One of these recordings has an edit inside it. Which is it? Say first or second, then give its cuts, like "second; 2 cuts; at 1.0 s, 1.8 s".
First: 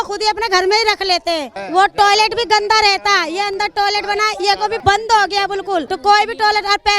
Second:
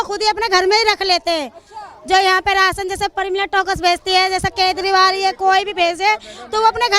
first; 3 cuts; at 1.5 s, 4.8 s, 5.9 s